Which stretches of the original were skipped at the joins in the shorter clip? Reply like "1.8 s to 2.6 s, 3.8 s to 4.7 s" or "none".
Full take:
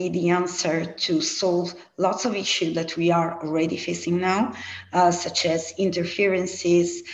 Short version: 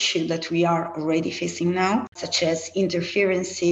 4.7 s to 5.3 s